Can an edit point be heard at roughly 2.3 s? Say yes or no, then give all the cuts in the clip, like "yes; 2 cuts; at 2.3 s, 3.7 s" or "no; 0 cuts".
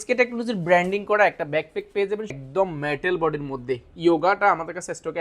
yes; 1 cut; at 2.3 s